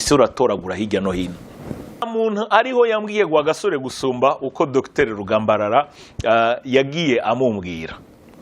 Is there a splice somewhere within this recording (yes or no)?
yes